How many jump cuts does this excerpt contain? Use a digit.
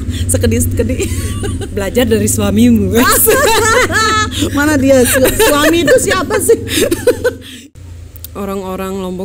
1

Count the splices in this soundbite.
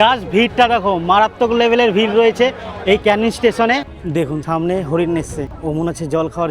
2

